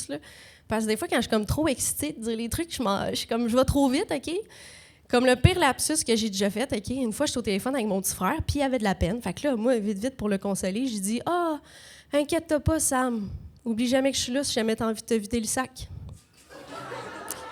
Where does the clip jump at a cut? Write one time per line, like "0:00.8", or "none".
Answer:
none